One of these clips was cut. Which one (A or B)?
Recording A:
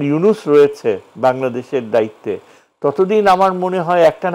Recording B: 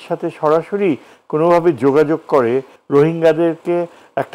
B